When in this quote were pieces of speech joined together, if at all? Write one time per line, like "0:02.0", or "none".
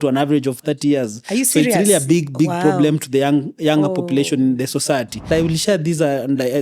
0:05.3